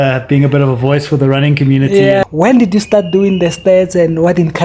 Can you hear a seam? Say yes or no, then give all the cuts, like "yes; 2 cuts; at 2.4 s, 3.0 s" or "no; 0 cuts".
yes; 1 cut; at 2.2 s